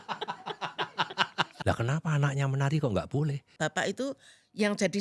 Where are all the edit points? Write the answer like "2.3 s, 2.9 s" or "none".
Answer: 1.6 s, 3.4 s